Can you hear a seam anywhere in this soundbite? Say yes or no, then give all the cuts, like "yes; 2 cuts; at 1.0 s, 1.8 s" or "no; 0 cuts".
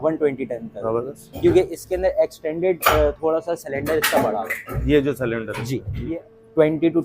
yes; 1 cut; at 6.0 s